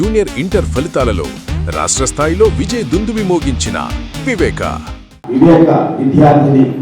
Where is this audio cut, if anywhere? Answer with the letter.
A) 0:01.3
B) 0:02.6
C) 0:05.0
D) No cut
D